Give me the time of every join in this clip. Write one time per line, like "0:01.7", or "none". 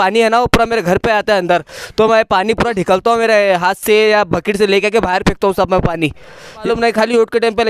0:06.6